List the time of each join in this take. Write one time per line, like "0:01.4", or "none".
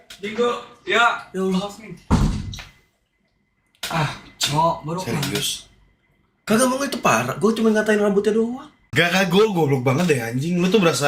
0:08.8

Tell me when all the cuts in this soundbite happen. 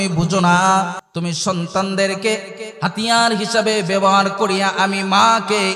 0:01.0

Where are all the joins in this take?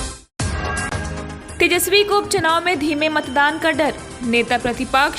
none

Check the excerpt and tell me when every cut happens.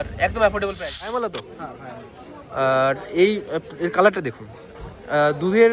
0:00.9

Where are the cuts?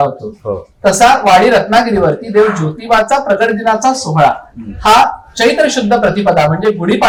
none

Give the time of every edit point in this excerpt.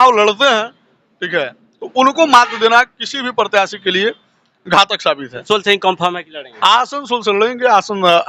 0:05.4

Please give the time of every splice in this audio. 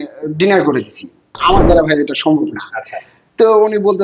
0:01.3

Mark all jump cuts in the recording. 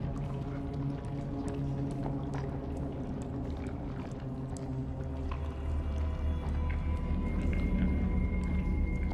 none

